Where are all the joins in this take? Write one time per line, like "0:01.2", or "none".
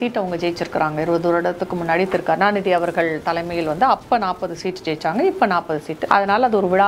0:05.9

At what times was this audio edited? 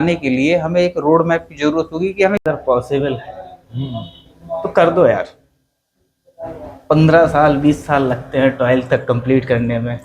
0:02.4

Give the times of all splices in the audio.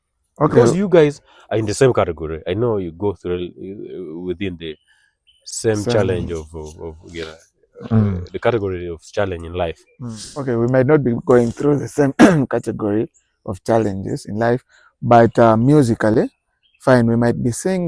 0:09.9

